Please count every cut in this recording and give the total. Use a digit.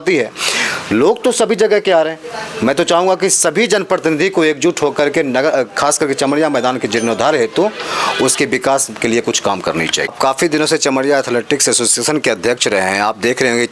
1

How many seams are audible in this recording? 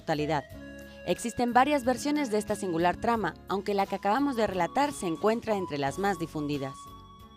1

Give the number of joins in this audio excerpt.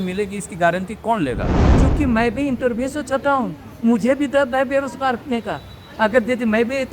1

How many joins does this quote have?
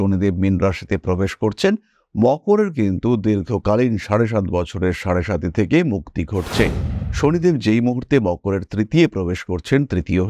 1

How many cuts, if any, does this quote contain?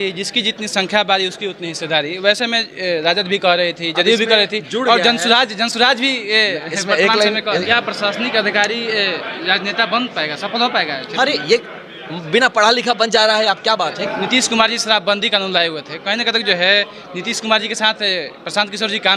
2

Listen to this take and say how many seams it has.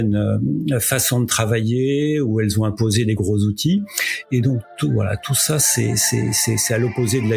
0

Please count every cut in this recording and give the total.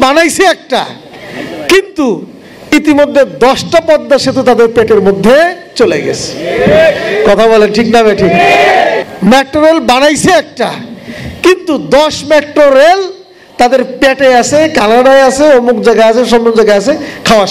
1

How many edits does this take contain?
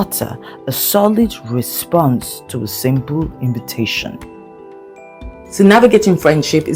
0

